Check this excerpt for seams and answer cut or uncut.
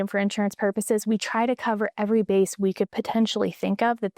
cut